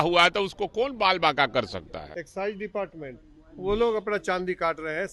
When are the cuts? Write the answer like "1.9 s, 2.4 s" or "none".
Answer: 2.1 s